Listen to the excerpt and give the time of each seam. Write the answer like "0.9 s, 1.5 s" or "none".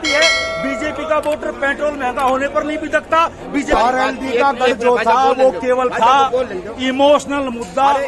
3.7 s